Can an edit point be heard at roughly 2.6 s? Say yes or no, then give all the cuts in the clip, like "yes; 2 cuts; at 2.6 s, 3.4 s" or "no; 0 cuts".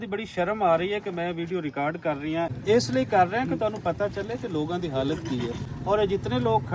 yes; 1 cut; at 2.6 s